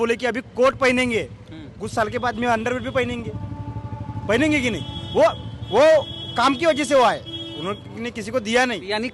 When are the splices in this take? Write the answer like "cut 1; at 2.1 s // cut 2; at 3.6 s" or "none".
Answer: none